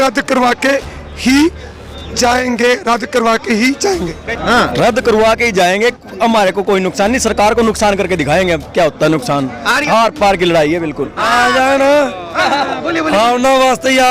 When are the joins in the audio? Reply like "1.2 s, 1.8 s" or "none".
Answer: 4.2 s, 9.8 s, 11.2 s